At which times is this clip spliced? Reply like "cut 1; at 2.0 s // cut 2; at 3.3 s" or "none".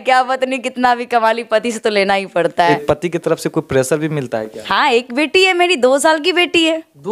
cut 1; at 2.8 s // cut 2; at 4.6 s